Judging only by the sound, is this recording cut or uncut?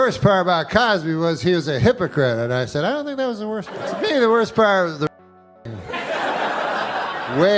cut